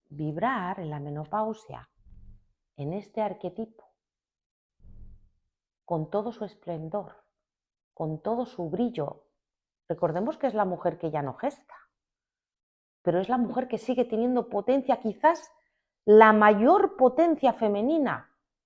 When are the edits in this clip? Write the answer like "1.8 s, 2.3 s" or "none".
none